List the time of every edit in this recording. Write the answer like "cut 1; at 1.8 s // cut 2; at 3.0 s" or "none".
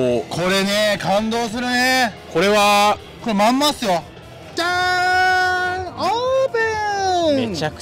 cut 1; at 4.5 s